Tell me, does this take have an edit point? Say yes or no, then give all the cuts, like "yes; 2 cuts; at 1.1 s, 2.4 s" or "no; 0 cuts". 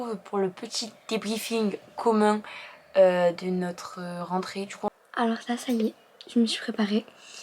yes; 1 cut; at 4.9 s